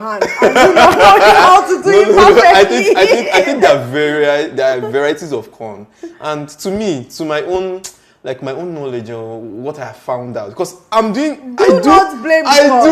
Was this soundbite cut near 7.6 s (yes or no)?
no